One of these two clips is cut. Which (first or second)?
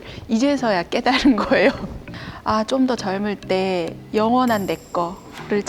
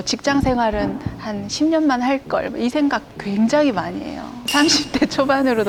first